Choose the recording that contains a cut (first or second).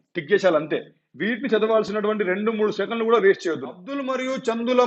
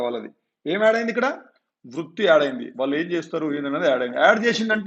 first